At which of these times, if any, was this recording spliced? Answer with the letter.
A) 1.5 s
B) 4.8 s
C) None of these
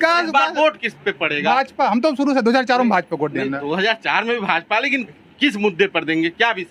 C